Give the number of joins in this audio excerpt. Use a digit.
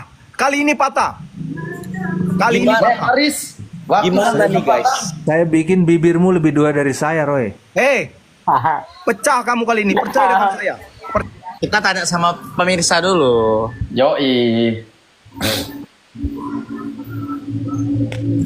1